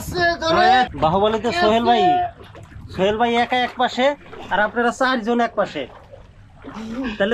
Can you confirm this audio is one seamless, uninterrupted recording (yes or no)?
no